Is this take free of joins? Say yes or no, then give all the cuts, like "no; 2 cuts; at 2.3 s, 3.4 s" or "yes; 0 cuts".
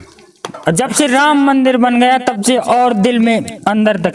yes; 0 cuts